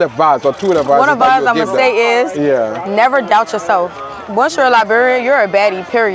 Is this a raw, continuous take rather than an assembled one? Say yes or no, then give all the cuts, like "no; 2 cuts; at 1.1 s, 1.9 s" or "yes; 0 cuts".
yes; 0 cuts